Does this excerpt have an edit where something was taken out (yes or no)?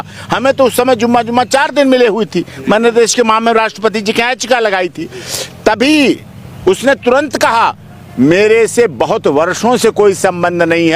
no